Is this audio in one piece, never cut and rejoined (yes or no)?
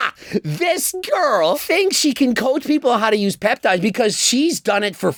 yes